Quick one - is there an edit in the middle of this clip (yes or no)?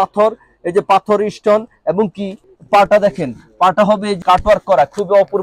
yes